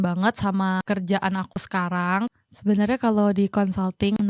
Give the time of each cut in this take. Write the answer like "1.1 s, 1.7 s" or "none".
0.8 s, 2.3 s